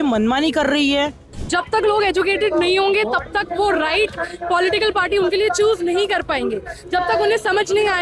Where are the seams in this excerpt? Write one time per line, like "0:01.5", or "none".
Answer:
0:01.3